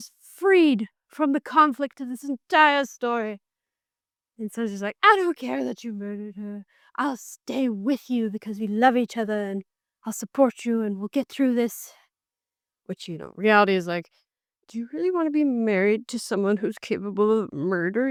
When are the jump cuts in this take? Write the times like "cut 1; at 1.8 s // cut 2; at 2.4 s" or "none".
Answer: none

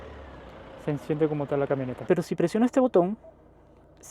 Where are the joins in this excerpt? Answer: cut 1; at 2.0 s

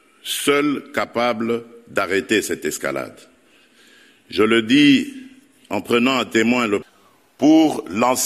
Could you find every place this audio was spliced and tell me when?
cut 1; at 6.8 s

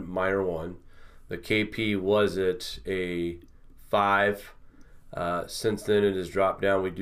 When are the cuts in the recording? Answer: none

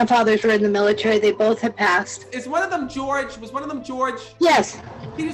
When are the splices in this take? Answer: cut 1; at 4.3 s

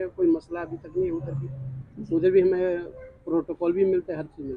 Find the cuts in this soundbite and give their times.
none

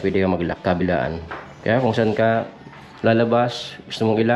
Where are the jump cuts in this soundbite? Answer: none

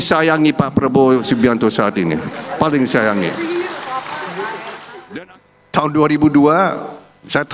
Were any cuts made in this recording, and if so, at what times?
cut 1; at 4.9 s

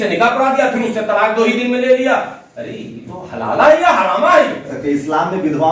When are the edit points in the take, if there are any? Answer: cut 1; at 4.7 s

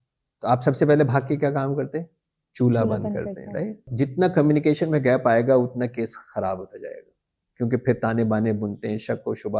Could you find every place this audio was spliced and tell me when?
cut 1; at 3.9 s

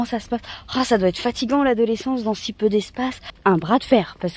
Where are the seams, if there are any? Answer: cut 1; at 3.2 s

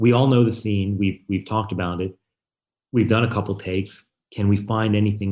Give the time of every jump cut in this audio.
none

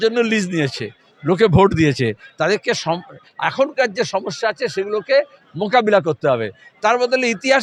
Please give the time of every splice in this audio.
none

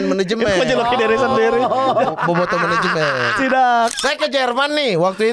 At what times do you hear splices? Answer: cut 1; at 4.0 s

